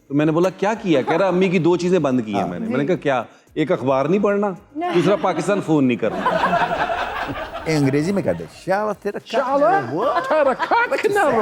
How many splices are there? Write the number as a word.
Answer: one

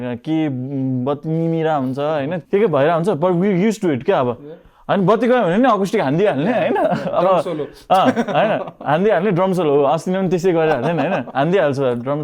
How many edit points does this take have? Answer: one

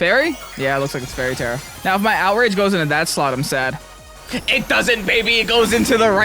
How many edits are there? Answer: one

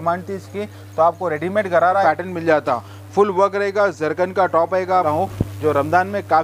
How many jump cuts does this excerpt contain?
two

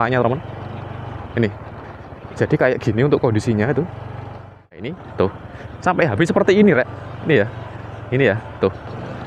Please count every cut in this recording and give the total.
one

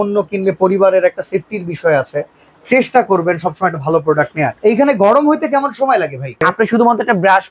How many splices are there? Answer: two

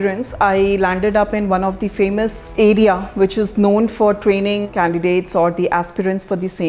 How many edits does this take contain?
zero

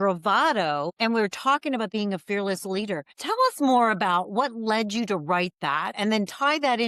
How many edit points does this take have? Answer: two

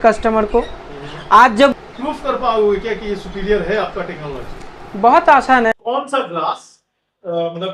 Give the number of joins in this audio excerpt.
two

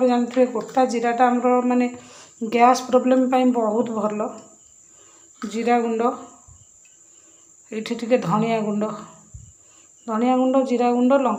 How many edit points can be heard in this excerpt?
zero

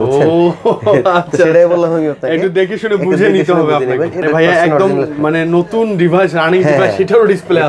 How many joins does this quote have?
one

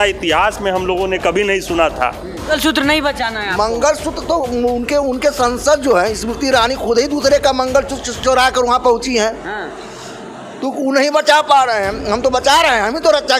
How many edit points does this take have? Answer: one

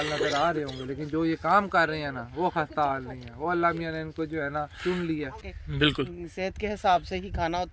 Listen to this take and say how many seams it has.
one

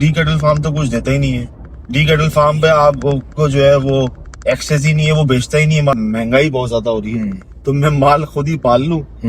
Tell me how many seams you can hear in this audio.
one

